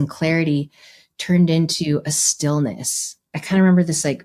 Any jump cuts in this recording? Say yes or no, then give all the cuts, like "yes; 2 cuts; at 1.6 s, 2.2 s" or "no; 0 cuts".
yes; 1 cut; at 3.3 s